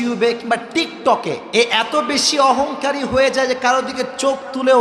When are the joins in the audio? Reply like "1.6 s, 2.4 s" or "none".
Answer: 1.4 s